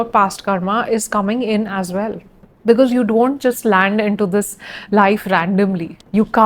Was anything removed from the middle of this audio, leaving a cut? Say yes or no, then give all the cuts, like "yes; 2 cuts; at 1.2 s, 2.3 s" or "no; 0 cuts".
no; 0 cuts